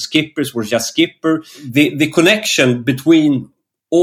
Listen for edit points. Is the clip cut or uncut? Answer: cut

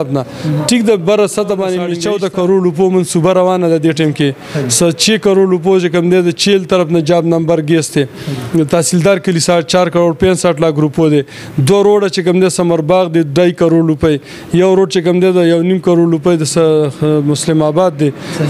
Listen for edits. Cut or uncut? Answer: cut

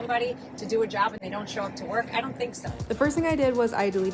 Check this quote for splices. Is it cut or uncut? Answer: cut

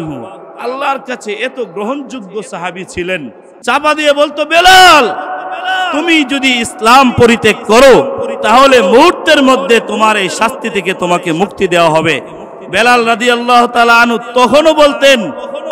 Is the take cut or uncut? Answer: cut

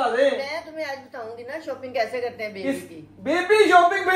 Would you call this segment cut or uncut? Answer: uncut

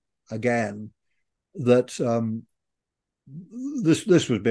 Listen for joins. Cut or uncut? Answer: uncut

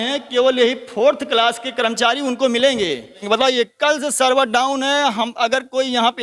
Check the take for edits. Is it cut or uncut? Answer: cut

